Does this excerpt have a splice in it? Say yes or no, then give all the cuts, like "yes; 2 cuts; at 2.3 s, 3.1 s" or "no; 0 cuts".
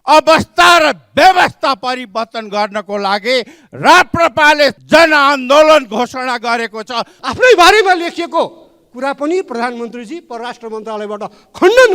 yes; 2 cuts; at 4.8 s, 7.1 s